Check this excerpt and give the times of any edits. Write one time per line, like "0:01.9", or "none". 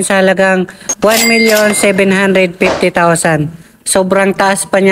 none